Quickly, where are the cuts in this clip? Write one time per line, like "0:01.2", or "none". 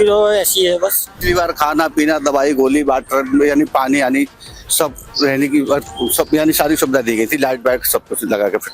0:01.1